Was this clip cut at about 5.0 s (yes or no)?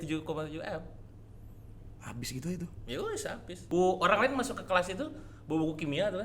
no